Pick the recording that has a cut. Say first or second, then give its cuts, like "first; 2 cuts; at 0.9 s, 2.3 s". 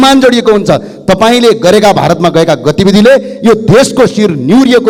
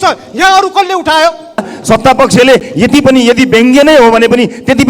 second; 1 cut; at 1.7 s